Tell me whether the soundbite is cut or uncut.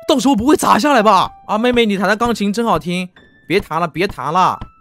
cut